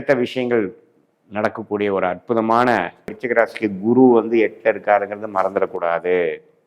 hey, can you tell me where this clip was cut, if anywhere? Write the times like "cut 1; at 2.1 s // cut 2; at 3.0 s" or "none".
cut 1; at 3.1 s